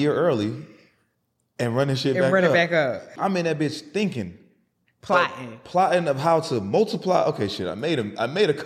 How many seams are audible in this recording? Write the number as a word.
one